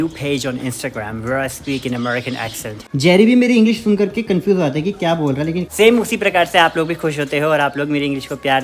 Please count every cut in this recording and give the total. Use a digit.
2